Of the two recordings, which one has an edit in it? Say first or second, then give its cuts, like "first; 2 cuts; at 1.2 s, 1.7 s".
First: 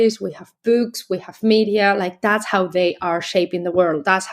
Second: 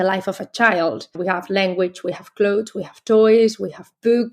second; 1 cut; at 1.1 s